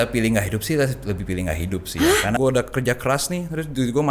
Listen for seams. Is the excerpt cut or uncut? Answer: cut